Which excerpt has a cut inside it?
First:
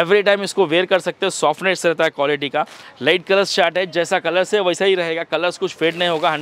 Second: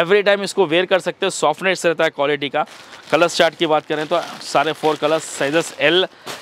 first; 1 cut; at 2.8 s

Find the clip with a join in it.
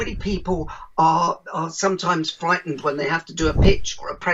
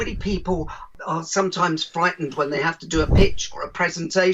second; 1 cut; at 0.9 s

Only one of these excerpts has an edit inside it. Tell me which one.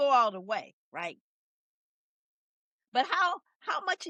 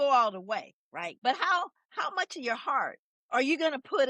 second; 2 cuts; at 1.1 s, 3.1 s

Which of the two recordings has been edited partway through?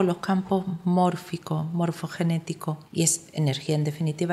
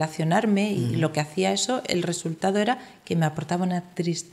first; 1 cut; at 2.8 s

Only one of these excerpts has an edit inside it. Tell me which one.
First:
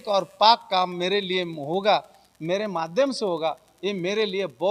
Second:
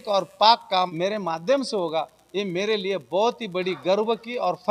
second; 1 cut; at 0.9 s

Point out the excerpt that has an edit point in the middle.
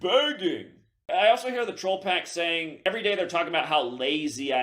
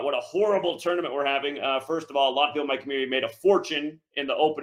first; 2 cuts; at 0.9 s, 2.8 s

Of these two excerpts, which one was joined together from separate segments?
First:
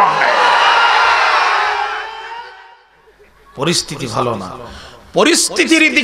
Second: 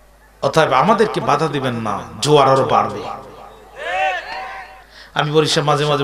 first; 1 cut; at 2.9 s

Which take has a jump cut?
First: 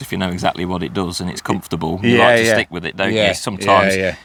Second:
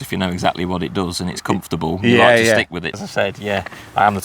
second; 1 cut; at 3.0 s

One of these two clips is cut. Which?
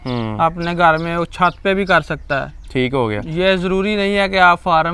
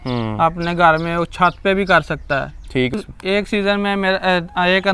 second; 1 cut; at 2.9 s

